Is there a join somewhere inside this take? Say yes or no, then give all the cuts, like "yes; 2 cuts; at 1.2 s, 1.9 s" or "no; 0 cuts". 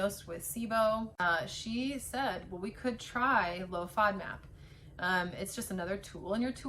yes; 1 cut; at 1.2 s